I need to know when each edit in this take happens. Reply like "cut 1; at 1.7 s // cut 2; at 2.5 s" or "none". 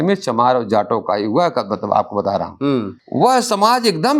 cut 1; at 3.0 s

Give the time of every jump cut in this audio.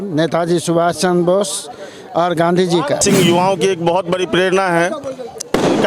cut 1; at 3.0 s

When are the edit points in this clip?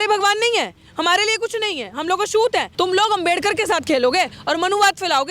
cut 1; at 2.7 s

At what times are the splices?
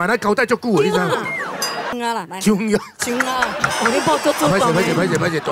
cut 1; at 1.9 s

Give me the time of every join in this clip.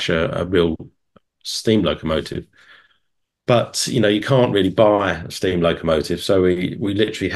none

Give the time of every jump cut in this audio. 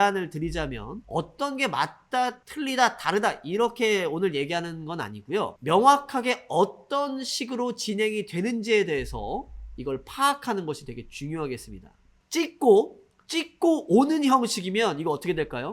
cut 1; at 2.4 s // cut 2; at 12.2 s

